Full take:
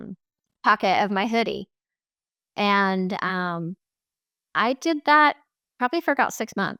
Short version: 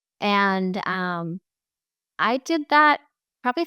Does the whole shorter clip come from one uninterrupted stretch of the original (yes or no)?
yes